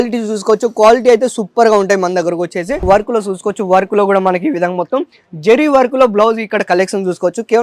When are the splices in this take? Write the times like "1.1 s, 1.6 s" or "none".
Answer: 2.8 s